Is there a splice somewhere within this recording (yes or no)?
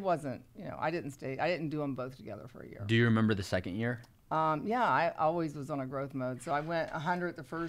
no